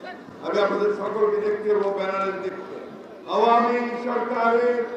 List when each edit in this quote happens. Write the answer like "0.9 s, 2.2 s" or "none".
3.1 s